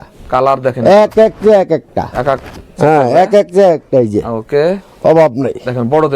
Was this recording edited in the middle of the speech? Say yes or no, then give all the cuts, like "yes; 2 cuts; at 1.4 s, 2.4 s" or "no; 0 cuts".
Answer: no; 0 cuts